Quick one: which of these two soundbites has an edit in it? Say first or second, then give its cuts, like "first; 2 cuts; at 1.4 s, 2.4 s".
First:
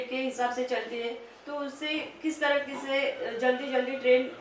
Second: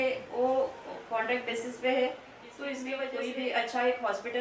second; 1 cut; at 3.0 s